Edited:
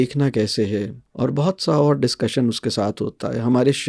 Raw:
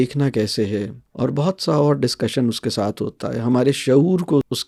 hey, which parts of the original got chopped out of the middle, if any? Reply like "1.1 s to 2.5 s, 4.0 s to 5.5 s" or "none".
none

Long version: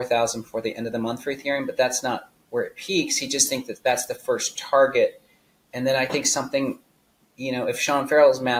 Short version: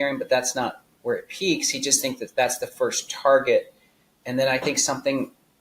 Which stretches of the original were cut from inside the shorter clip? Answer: none

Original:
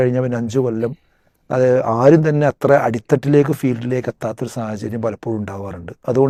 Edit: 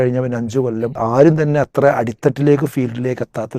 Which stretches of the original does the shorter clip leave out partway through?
1.0 s to 1.8 s

